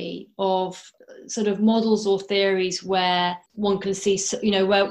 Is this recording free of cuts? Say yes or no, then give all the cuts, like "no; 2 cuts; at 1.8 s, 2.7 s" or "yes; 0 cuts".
no; 2 cuts; at 0.9 s, 3.5 s